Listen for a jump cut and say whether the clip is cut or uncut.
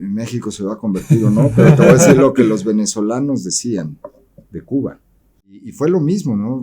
cut